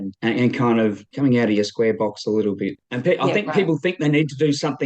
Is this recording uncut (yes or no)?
no